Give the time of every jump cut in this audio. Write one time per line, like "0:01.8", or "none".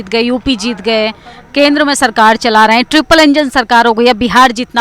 none

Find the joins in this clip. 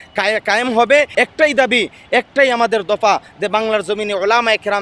0:01.1

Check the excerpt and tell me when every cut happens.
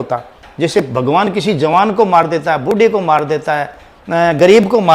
none

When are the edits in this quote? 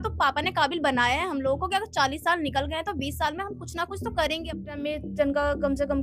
0:04.8

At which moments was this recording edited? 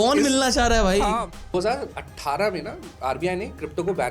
0:01.3

